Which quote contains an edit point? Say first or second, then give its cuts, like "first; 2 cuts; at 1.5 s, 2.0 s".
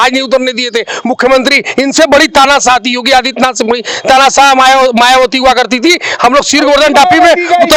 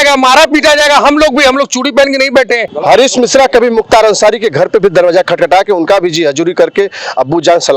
second; 1 cut; at 2.7 s